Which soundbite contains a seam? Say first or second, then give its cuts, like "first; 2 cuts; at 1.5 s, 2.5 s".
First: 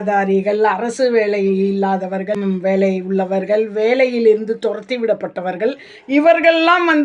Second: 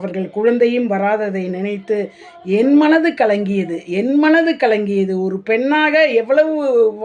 first; 1 cut; at 2.3 s